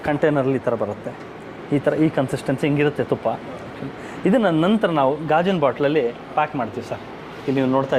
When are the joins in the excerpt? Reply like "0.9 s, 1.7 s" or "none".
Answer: none